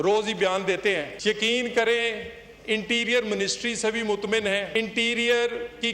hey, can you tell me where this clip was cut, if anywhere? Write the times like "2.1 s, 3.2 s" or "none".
1.1 s, 4.7 s